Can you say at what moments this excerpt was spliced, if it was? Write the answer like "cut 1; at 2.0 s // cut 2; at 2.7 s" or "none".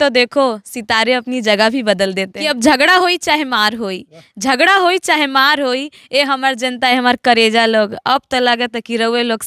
cut 1; at 2.3 s